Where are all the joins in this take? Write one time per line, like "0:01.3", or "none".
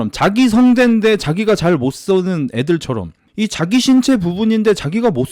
0:03.2